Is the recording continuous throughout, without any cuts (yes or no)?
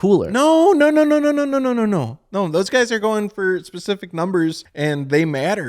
no